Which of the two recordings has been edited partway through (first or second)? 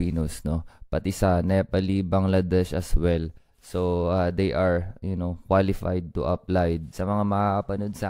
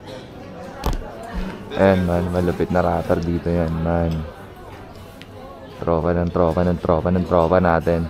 first